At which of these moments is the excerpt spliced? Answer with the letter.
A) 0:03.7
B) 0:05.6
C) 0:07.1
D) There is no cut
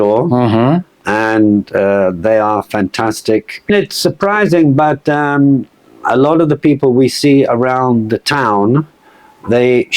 A